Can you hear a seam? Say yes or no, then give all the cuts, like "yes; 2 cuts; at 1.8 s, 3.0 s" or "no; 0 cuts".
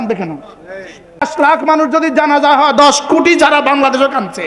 yes; 1 cut; at 1.2 s